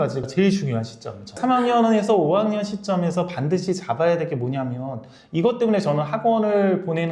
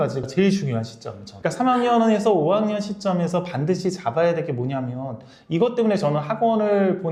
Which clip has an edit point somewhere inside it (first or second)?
first